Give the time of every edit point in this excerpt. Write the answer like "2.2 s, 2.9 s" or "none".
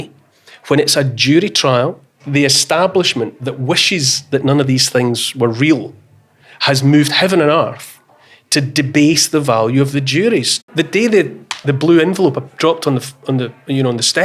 2.1 s, 10.6 s